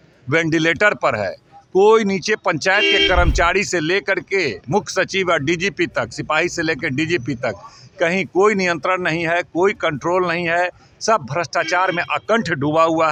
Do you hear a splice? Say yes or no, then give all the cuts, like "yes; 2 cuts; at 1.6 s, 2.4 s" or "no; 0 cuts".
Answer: no; 0 cuts